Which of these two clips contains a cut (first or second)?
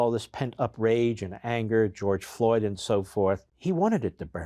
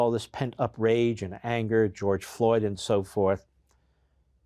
first